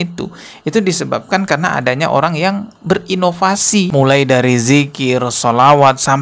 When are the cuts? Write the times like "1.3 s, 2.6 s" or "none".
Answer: 3.9 s